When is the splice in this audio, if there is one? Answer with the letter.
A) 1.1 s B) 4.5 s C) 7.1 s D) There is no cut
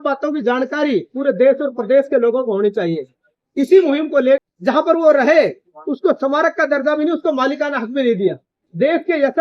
B